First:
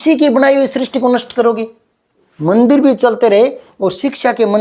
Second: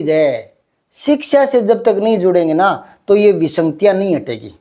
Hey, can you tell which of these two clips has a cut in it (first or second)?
first